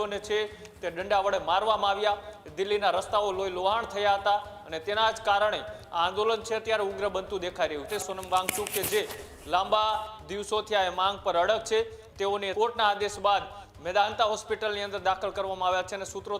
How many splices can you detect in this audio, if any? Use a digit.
2